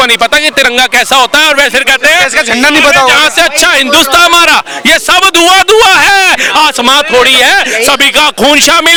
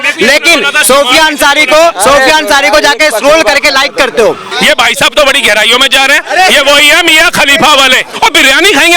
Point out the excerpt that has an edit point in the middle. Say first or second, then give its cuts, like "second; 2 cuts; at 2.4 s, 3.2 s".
second; 2 cuts; at 4.5 s, 8.1 s